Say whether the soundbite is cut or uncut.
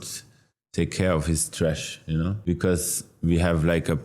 cut